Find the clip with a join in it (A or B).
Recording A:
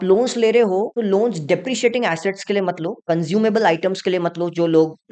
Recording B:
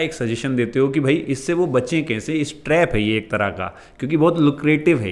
A